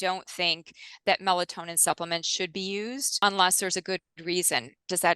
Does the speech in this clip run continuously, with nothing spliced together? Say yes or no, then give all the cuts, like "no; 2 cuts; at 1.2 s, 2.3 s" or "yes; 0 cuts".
no; 1 cut; at 3.1 s